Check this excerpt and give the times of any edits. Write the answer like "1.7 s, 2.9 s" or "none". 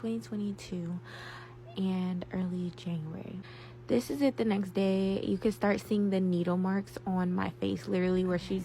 3.5 s